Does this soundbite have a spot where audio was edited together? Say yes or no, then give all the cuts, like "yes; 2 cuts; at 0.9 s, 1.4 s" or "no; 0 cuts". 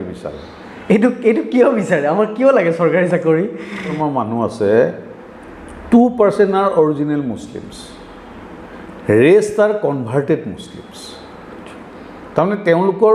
yes; 1 cut; at 4.0 s